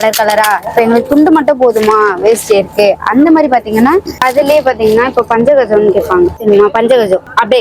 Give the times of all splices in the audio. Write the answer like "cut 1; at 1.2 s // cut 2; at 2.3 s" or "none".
cut 1; at 4.1 s